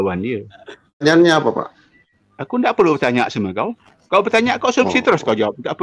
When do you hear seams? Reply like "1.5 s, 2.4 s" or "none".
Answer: 1.0 s